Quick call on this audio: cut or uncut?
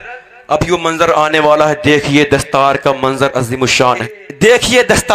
cut